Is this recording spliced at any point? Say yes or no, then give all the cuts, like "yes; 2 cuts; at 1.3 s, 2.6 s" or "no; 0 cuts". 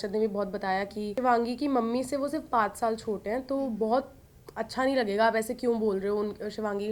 yes; 1 cut; at 1.1 s